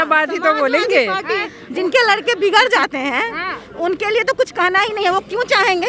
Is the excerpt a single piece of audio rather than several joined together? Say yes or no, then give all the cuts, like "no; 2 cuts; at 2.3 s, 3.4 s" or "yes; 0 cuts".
yes; 0 cuts